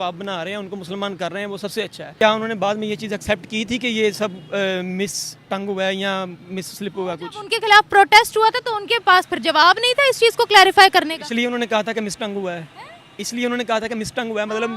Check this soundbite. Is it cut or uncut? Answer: cut